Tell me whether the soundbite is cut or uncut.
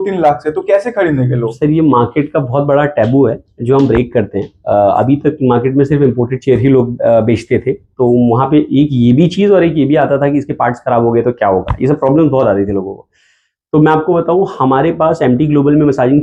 uncut